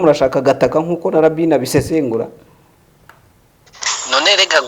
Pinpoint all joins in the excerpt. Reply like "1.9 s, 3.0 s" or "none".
none

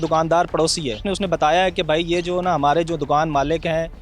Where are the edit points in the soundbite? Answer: 1.1 s

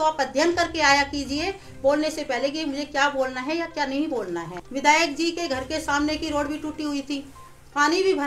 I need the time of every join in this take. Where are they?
4.6 s

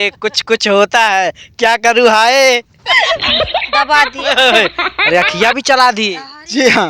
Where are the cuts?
3.3 s

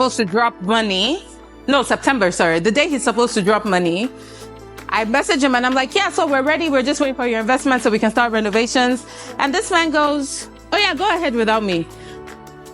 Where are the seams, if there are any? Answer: none

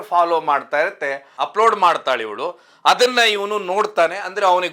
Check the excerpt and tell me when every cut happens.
1.4 s

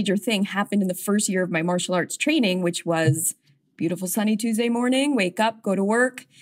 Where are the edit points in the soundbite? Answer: none

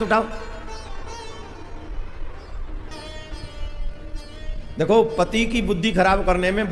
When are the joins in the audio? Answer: 2.9 s

